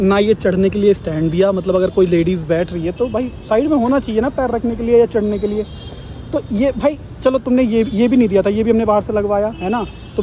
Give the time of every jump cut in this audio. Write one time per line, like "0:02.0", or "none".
none